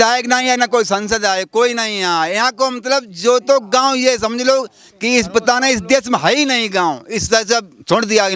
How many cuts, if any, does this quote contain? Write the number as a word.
zero